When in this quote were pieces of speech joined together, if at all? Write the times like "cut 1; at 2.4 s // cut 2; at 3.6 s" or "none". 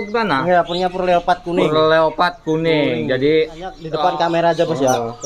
cut 1; at 3.9 s